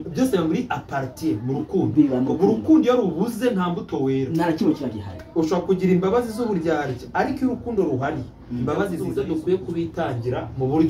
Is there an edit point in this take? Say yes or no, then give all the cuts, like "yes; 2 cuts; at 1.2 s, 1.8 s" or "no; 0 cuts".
yes; 1 cut; at 9.1 s